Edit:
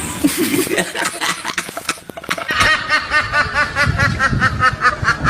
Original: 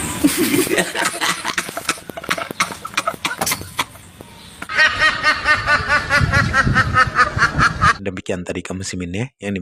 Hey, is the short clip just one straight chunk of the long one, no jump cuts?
no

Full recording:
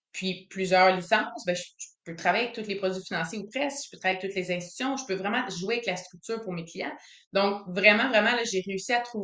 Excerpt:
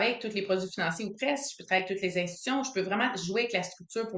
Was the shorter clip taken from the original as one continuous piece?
yes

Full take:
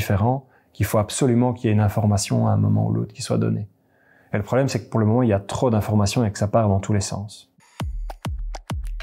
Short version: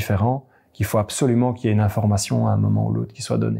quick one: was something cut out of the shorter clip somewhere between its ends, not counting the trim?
no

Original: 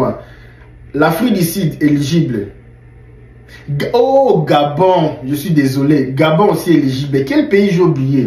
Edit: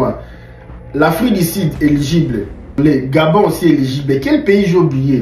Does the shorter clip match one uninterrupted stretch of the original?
no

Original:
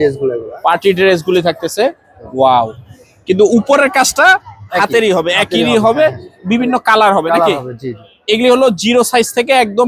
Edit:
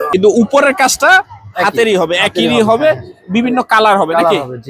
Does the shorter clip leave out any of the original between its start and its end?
no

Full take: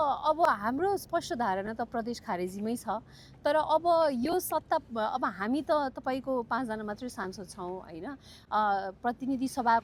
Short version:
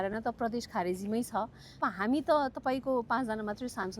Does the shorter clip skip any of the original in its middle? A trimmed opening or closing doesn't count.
yes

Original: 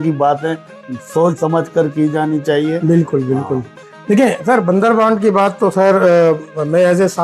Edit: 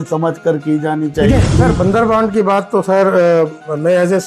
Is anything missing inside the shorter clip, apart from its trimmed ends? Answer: yes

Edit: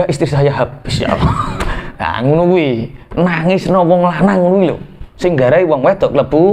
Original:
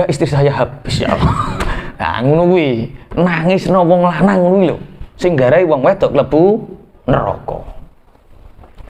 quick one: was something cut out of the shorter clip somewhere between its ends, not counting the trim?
no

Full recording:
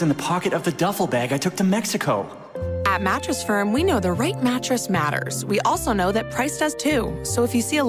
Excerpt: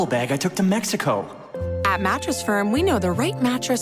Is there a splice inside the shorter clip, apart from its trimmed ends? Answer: no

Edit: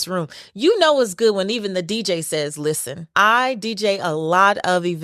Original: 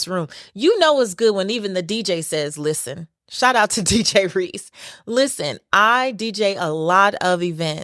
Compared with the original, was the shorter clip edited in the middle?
yes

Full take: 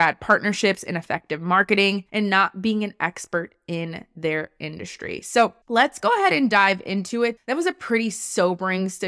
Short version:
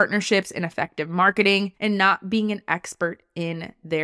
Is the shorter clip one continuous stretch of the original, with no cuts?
yes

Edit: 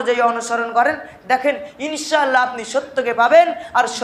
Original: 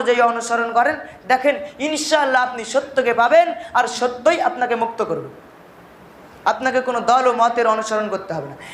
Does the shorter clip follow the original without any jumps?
yes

